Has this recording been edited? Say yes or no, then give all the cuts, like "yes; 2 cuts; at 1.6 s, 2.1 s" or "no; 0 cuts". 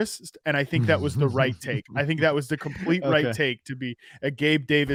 no; 0 cuts